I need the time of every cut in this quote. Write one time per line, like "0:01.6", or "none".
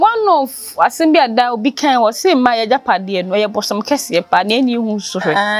none